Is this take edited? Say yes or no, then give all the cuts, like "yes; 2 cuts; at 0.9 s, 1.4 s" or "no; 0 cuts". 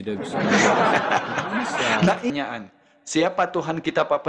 yes; 1 cut; at 2.3 s